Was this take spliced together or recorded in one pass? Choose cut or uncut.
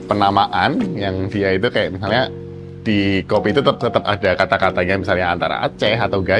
uncut